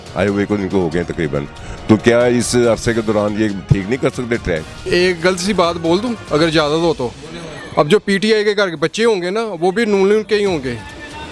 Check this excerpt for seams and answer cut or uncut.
cut